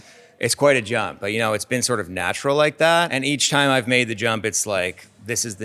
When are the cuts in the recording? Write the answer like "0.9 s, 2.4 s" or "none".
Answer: 3.1 s